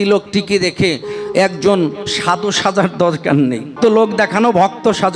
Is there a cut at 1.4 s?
no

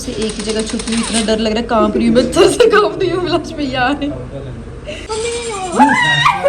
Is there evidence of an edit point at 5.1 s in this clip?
yes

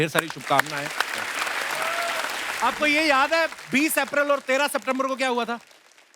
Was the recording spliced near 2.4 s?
yes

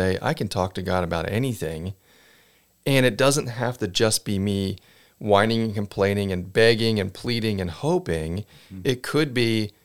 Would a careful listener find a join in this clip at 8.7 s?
no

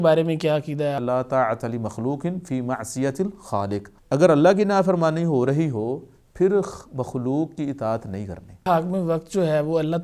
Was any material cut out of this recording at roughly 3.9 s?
yes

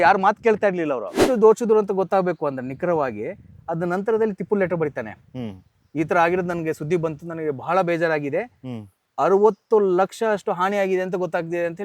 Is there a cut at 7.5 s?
no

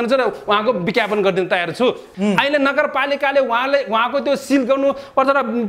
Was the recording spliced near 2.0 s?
yes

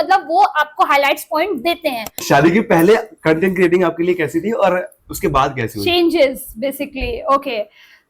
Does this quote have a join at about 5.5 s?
no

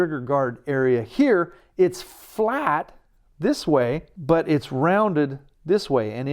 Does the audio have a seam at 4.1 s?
yes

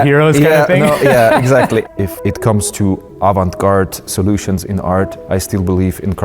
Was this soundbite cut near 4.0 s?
no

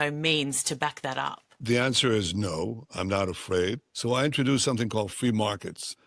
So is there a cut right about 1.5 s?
yes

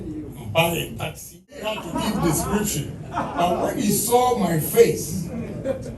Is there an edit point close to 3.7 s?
no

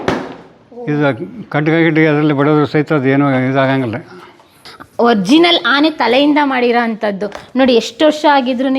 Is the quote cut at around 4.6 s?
yes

